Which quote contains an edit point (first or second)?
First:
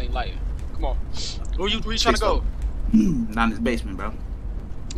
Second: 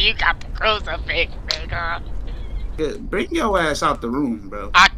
second